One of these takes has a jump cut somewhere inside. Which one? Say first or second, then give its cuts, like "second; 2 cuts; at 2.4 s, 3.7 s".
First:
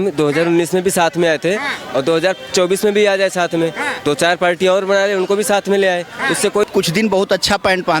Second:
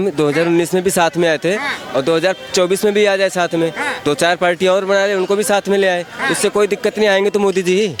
first; 1 cut; at 6.7 s